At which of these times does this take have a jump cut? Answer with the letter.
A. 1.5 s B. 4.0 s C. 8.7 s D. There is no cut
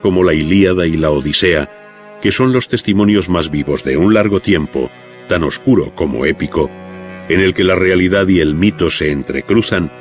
B